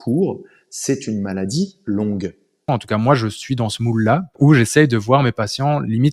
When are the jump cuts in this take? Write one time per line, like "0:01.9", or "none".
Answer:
0:02.7
0:04.3